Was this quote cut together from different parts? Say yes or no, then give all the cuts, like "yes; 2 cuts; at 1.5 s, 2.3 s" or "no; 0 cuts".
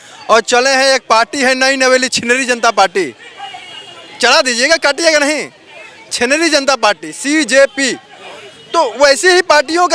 no; 0 cuts